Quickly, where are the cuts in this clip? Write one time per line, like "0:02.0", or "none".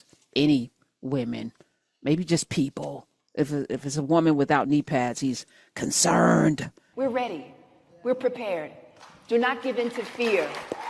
0:06.8